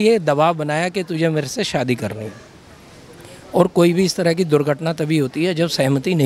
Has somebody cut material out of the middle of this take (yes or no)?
no